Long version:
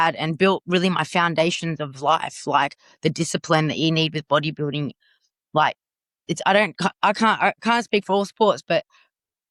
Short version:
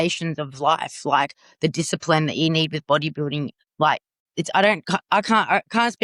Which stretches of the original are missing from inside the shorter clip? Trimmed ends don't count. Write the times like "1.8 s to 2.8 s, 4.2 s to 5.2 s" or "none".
5.4 s to 5.9 s